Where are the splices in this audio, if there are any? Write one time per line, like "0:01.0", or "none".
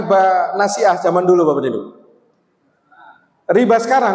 none

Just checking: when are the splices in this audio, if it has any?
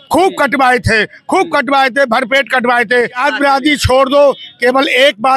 0:03.0

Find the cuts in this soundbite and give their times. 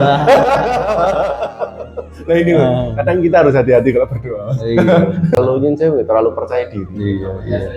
0:05.4

